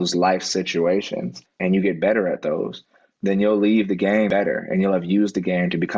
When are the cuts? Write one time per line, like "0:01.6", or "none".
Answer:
0:01.6
0:04.3